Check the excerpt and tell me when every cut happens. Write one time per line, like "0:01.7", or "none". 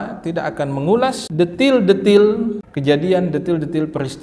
0:01.2
0:02.7